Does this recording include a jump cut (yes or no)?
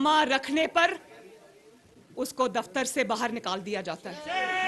no